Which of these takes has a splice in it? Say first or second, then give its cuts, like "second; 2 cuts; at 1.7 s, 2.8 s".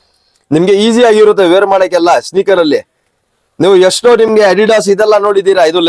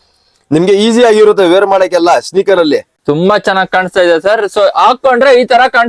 second; 1 cut; at 2.9 s